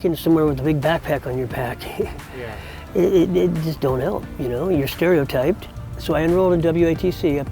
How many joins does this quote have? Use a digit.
1